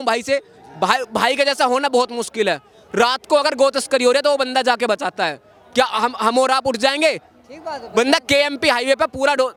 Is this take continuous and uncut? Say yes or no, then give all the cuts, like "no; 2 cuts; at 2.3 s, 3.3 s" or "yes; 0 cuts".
yes; 0 cuts